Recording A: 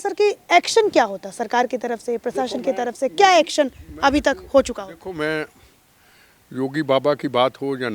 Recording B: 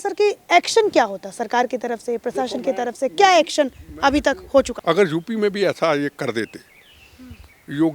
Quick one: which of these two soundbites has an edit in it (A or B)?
B